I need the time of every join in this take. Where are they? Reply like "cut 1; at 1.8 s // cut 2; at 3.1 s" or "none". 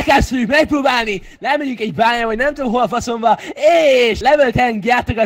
cut 1; at 4.2 s